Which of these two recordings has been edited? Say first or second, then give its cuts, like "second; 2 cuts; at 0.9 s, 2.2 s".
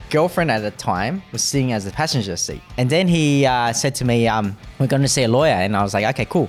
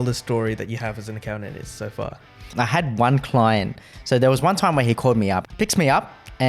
second; 3 cuts; at 2.5 s, 3.8 s, 5.5 s